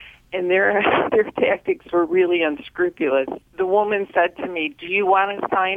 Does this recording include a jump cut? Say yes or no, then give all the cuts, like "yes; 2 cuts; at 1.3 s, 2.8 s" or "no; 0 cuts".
yes; 1 cut; at 3.4 s